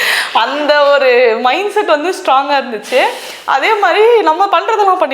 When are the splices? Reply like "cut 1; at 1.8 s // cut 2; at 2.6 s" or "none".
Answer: none